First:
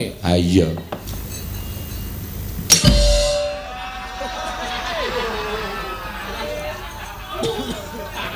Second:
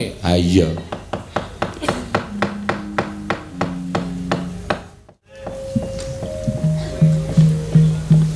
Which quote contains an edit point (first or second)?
first